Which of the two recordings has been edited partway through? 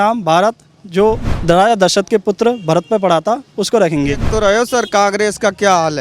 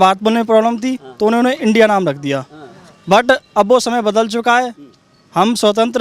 first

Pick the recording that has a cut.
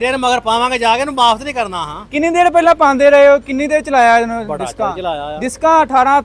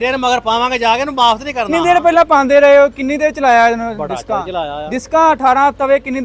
second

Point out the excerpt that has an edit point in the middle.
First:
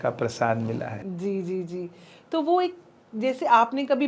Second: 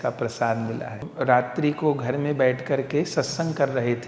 second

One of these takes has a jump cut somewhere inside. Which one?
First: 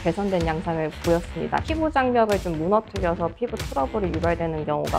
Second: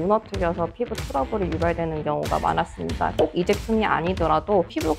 first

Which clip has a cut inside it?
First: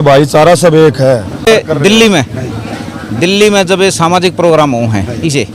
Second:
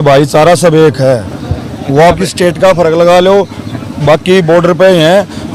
first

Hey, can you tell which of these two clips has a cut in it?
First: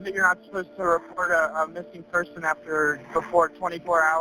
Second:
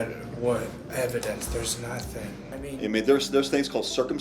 second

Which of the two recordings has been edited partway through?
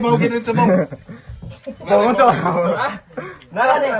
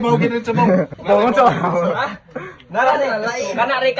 second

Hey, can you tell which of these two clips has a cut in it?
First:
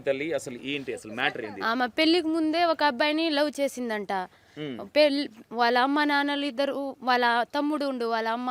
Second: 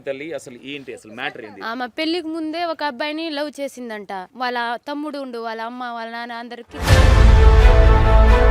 second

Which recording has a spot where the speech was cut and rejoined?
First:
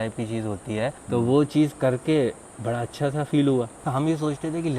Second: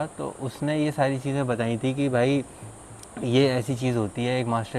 first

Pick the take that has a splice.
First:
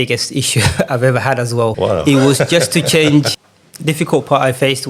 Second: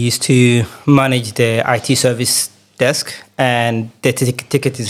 first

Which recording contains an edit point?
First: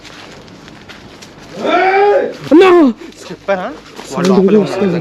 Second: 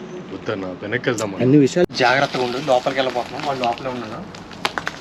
second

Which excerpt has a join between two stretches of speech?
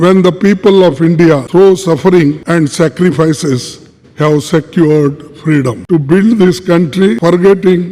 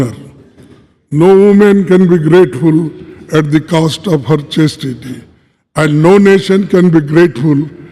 first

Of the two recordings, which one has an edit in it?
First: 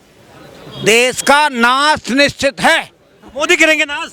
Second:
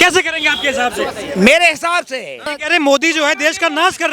second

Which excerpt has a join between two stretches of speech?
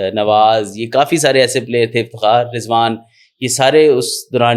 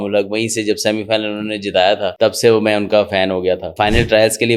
second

